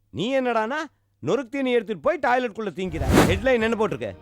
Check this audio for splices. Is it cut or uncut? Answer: cut